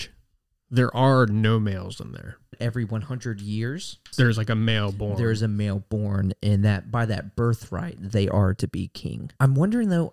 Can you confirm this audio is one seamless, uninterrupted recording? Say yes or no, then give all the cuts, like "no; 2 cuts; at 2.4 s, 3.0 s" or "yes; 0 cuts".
no; 3 cuts; at 2.6 s, 4.1 s, 9.3 s